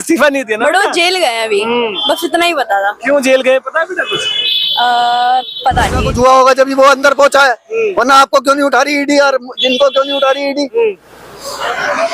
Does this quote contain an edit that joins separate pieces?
yes; 1 cut; at 6.0 s

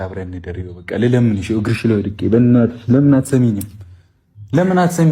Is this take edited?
no; 0 cuts

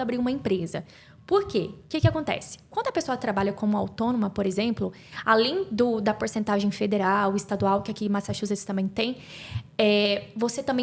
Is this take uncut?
yes; 0 cuts

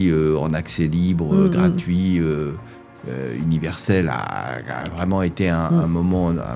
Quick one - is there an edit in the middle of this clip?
no; 0 cuts

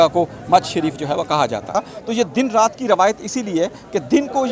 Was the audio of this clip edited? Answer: yes; 1 cut; at 1.7 s

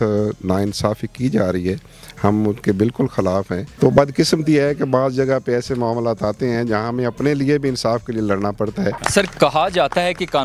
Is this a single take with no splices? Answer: no; 2 cuts; at 3.6 s, 9.0 s

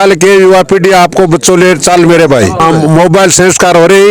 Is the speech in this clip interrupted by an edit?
yes; 1 cut; at 2.6 s

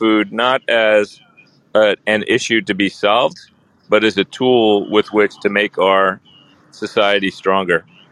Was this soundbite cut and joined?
no; 0 cuts

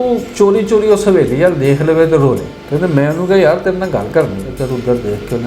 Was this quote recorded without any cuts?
no; 2 cuts; at 2.6 s, 4.5 s

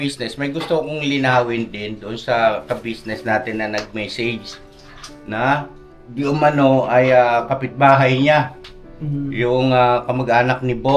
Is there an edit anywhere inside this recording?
no; 0 cuts

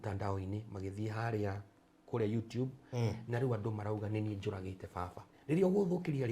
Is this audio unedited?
no; 1 cut; at 5.3 s

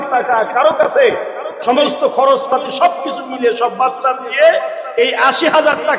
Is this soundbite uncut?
yes; 0 cuts

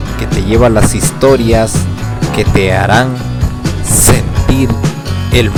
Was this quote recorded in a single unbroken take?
yes; 0 cuts

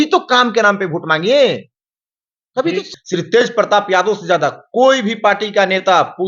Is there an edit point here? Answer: yes; 1 cut; at 2.9 s

